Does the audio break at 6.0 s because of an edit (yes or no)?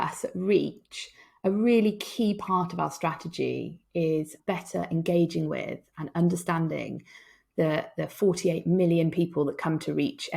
no